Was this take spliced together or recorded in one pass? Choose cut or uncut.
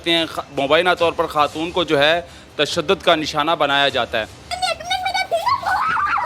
cut